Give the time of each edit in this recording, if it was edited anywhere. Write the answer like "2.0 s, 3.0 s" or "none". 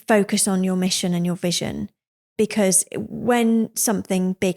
2.3 s